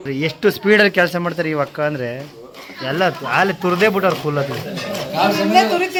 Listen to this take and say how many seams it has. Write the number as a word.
zero